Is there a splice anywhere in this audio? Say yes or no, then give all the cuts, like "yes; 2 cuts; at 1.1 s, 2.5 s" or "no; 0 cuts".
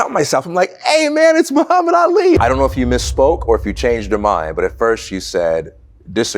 yes; 1 cut; at 2.4 s